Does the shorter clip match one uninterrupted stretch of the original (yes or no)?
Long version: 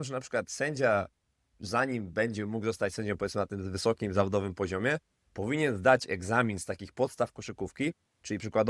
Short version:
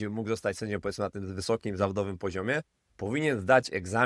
yes